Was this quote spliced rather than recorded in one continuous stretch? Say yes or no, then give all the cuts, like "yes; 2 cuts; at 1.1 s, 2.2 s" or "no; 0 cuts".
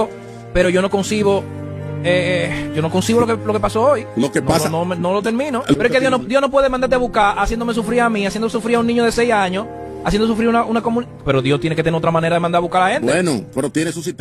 no; 0 cuts